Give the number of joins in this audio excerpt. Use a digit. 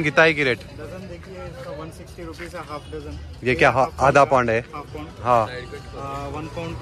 0